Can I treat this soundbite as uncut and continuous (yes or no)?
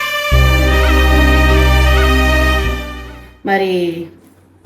yes